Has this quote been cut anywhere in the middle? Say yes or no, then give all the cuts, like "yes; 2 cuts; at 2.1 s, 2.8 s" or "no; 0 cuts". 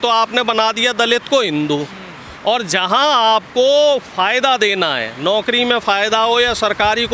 no; 0 cuts